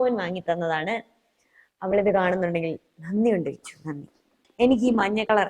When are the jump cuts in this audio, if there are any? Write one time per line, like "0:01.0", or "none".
0:04.4